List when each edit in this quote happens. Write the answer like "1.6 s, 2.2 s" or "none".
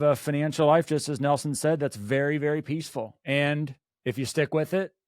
3.2 s